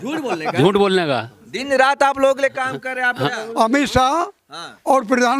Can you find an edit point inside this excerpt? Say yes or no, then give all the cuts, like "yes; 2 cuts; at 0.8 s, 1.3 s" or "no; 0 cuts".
yes; 1 cut; at 3.1 s